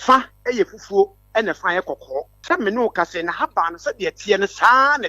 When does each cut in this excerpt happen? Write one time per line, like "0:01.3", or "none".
0:02.3